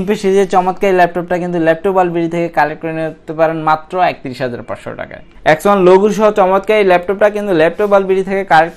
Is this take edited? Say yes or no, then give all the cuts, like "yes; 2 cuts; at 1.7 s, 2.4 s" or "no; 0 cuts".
yes; 1 cut; at 5.2 s